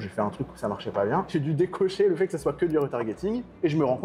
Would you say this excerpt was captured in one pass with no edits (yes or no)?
yes